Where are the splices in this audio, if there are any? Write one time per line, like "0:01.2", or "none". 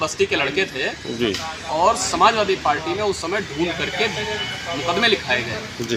none